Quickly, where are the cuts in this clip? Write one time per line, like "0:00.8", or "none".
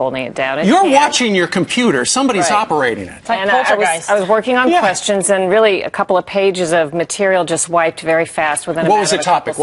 0:01.7